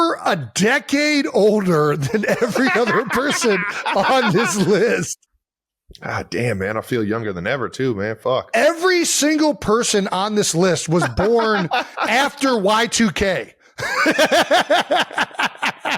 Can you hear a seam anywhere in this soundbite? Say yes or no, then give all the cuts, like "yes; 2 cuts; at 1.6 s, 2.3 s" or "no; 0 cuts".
no; 0 cuts